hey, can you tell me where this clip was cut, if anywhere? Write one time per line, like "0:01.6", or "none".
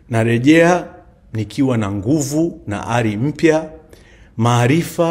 none